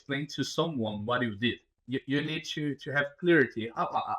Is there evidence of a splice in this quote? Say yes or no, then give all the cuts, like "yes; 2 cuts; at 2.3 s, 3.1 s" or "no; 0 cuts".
yes; 1 cut; at 1.7 s